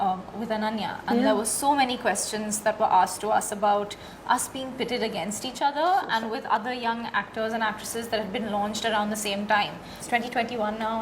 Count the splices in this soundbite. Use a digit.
1